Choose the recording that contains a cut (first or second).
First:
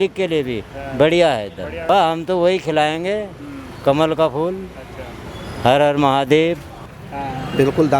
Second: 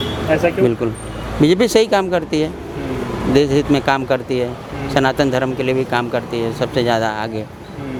first